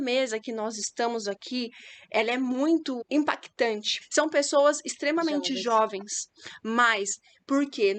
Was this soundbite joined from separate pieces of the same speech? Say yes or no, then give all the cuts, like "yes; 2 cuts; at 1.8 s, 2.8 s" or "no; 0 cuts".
yes; 2 cuts; at 3.0 s, 4.0 s